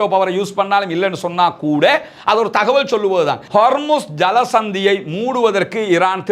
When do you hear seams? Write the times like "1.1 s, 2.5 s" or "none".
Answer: 3.4 s